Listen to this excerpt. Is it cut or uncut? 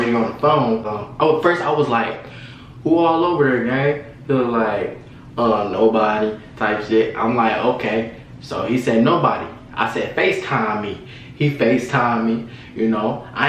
cut